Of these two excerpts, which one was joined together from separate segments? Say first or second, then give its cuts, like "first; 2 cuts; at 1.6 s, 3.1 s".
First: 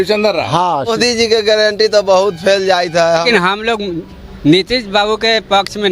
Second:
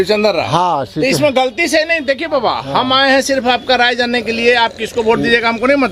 first; 2 cuts; at 0.9 s, 3.2 s